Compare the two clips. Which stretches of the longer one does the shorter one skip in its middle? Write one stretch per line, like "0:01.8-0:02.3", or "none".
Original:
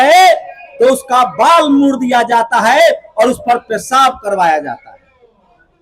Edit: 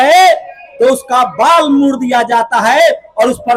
none